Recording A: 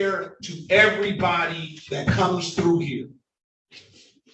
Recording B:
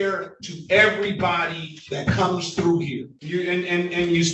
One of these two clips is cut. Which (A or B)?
B